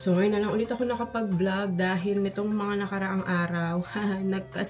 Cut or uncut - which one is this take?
uncut